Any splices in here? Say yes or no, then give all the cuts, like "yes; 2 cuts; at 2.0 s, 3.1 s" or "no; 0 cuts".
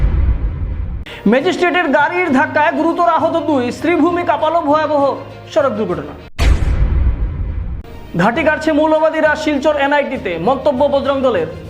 yes; 1 cut; at 1.0 s